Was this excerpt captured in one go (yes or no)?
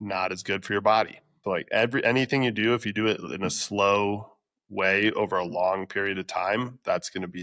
no